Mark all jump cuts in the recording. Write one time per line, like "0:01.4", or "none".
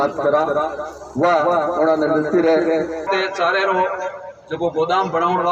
0:03.1